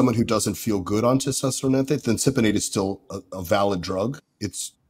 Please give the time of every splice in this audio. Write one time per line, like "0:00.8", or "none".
none